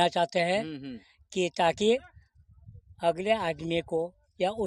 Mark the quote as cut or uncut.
uncut